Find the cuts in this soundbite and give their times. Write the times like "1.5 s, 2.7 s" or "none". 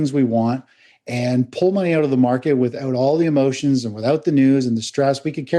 none